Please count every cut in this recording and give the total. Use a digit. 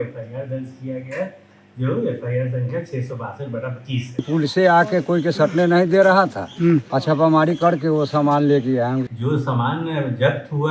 3